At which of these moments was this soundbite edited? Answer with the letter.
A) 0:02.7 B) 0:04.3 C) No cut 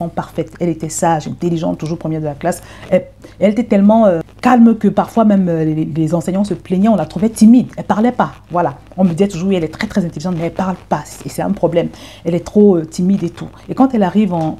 B